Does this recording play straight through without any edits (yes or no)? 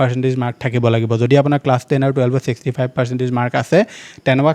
yes